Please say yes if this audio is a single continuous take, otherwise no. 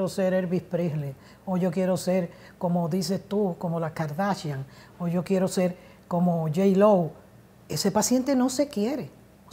yes